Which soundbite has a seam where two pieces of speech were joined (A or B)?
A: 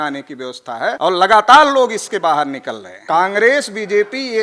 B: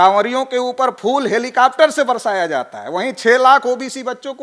A